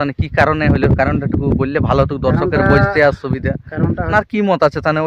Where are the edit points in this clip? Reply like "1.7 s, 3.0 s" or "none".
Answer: 4.1 s